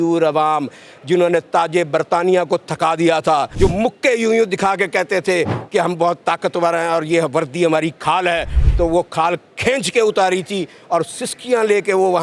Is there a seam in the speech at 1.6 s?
no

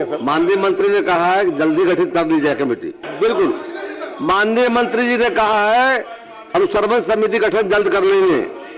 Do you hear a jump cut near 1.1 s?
no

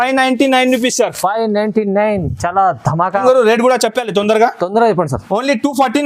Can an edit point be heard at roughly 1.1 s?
no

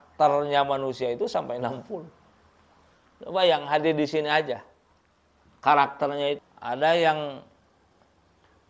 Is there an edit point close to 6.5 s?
yes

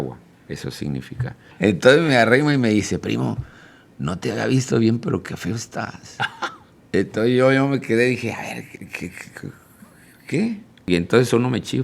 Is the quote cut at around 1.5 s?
yes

